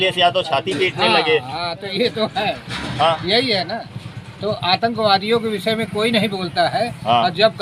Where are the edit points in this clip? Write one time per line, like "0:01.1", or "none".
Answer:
none